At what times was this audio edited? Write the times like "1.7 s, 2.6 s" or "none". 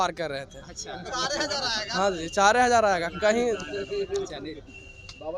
none